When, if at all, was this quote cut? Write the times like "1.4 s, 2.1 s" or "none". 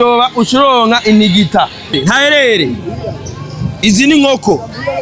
2.0 s